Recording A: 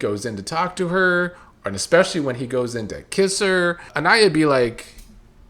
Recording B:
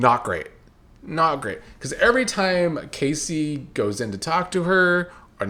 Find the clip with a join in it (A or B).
A